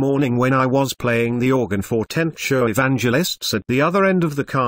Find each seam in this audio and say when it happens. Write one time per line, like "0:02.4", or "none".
0:01.5